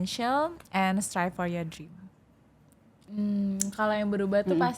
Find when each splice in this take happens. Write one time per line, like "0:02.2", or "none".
0:02.9